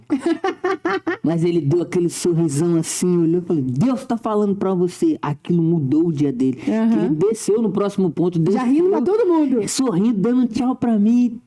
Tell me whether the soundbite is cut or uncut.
uncut